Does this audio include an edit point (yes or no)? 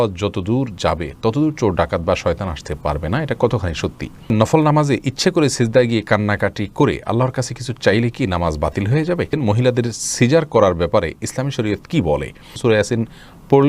yes